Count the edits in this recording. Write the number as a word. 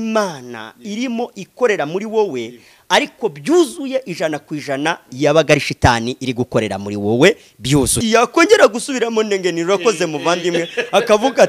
one